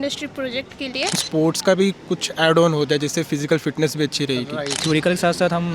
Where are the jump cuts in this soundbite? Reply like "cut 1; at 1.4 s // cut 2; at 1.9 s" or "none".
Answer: cut 1; at 1.2 s // cut 2; at 4.8 s